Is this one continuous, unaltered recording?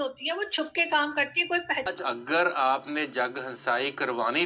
no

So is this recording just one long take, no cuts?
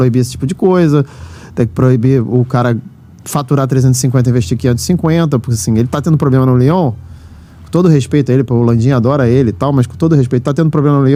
yes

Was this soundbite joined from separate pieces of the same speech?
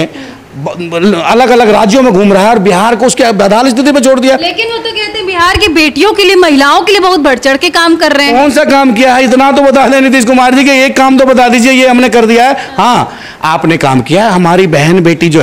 no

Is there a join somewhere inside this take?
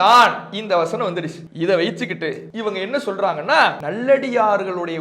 yes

